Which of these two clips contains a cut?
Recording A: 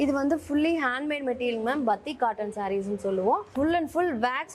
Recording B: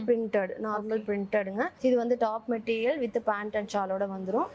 A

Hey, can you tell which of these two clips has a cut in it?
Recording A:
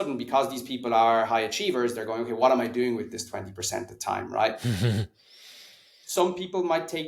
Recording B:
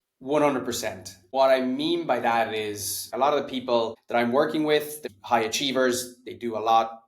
B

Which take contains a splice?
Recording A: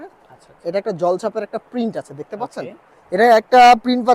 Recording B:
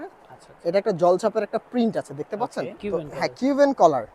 B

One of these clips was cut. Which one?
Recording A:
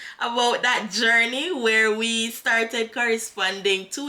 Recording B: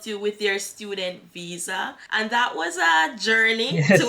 B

